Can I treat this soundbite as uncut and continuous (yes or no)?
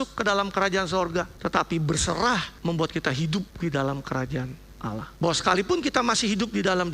no